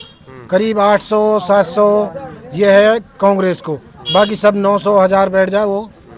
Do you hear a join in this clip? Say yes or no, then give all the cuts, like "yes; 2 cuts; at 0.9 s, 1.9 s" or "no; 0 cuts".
no; 0 cuts